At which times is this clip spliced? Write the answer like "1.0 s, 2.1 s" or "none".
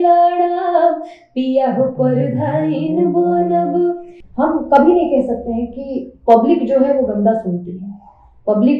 4.2 s